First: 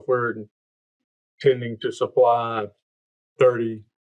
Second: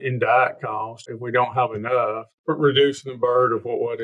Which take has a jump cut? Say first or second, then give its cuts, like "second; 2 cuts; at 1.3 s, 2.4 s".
second; 2 cuts; at 1.0 s, 2.3 s